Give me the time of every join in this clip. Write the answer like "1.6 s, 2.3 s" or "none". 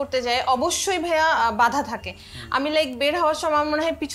none